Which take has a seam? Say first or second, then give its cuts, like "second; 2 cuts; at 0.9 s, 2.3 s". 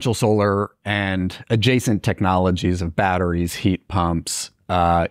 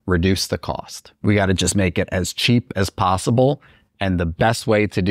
second; 1 cut; at 1.0 s